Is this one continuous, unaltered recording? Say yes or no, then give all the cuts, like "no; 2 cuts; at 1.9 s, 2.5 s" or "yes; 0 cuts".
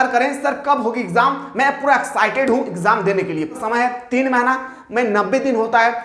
no; 1 cut; at 3.6 s